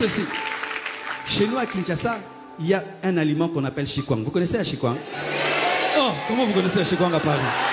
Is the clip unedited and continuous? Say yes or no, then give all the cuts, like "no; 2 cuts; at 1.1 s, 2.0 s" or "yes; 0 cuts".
yes; 0 cuts